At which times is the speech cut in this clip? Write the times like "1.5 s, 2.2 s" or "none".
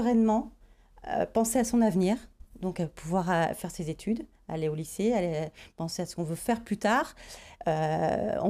none